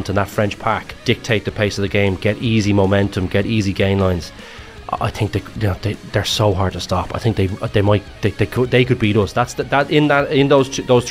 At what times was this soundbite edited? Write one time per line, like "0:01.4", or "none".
0:00.9